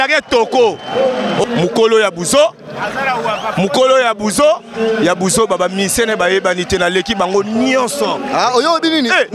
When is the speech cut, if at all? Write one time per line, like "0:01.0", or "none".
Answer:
0:01.4